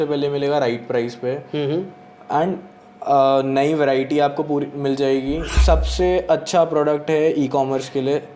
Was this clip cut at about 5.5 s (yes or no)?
yes